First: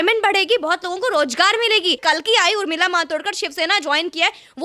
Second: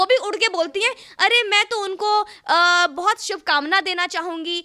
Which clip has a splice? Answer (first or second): first